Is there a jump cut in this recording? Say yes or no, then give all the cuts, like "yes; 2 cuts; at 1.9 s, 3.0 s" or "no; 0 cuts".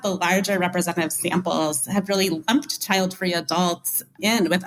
no; 0 cuts